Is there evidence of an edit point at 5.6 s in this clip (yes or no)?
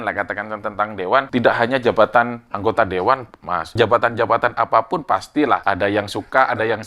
yes